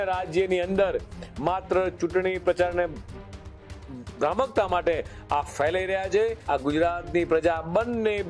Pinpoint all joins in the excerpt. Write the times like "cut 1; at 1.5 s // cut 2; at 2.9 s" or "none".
cut 1; at 6.4 s

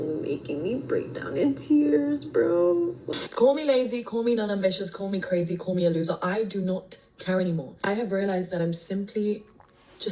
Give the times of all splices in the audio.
cut 1; at 3.1 s

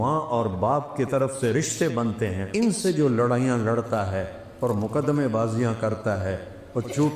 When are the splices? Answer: cut 1; at 2.4 s

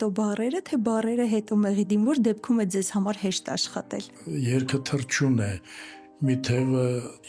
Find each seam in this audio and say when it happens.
cut 1; at 4.2 s

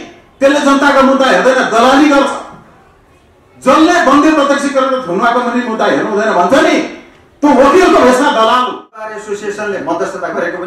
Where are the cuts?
cut 1; at 9.2 s

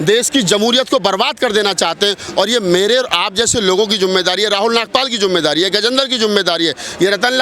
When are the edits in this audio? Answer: none

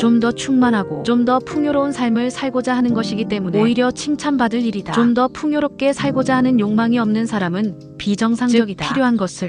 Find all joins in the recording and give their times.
none

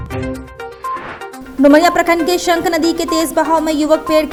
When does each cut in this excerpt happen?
none

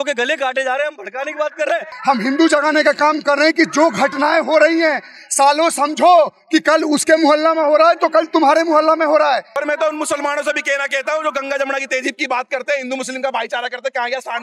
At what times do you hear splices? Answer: cut 1; at 1.9 s // cut 2; at 9.5 s

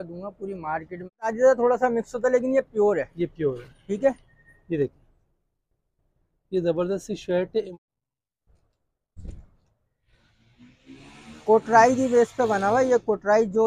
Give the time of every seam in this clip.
cut 1; at 1.3 s // cut 2; at 7.7 s

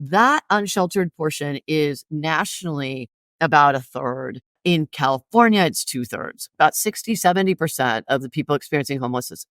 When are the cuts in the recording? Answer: cut 1; at 4.6 s

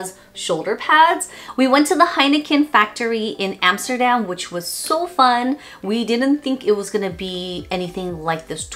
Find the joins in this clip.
cut 1; at 1.4 s

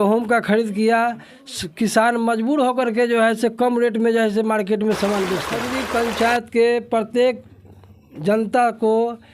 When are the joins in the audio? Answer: cut 1; at 5.8 s

